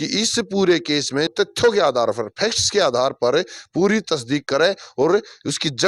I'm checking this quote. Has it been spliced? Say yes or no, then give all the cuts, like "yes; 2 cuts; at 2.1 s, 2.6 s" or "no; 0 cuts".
yes; 1 cut; at 1.3 s